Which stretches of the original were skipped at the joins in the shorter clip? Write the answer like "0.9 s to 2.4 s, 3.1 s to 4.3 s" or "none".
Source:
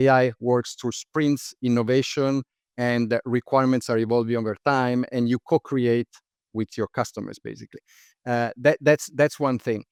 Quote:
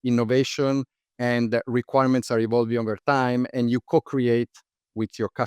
none